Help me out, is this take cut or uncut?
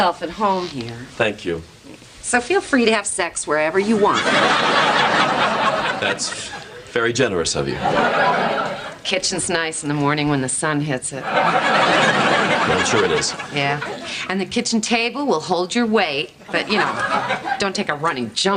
uncut